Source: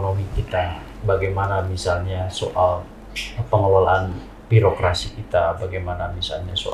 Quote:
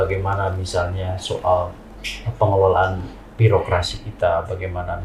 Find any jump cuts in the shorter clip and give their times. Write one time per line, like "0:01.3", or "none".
none